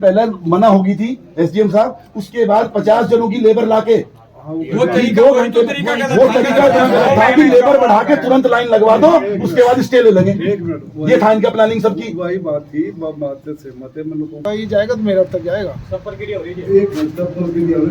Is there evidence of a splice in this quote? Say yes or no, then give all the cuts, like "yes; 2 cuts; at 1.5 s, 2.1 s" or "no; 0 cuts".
yes; 1 cut; at 14.4 s